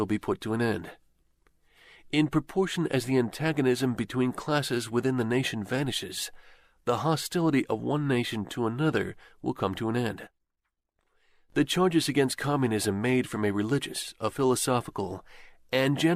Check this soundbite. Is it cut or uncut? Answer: cut